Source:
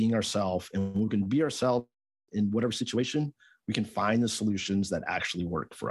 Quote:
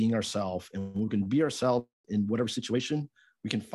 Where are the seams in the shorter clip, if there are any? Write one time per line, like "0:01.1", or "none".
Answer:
0:02.0